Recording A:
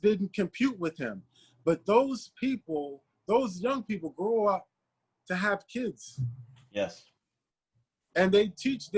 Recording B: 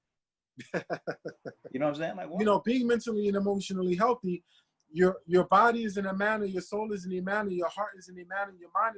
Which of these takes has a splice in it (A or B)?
B